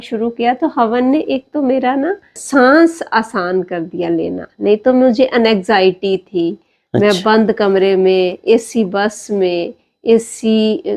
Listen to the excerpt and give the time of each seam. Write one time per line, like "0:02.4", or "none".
0:02.4

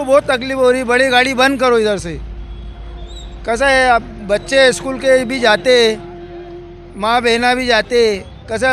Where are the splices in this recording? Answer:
none

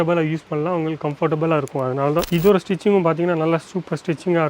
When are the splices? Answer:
0:02.3

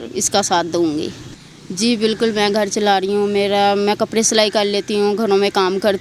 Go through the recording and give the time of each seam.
0:01.2

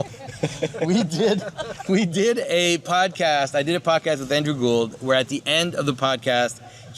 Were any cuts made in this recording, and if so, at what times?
none

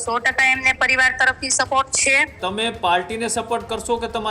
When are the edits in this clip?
0:02.4

